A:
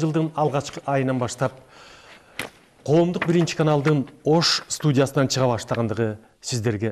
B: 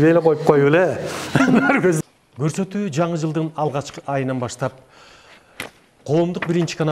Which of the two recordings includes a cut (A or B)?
B